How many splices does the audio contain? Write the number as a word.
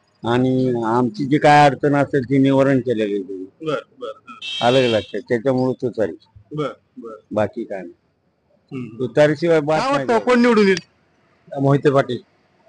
one